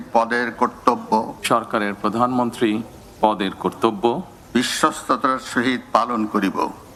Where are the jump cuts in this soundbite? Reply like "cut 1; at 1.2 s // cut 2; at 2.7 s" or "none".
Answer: none